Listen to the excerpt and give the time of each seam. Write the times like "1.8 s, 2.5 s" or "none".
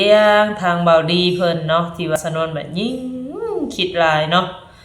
2.2 s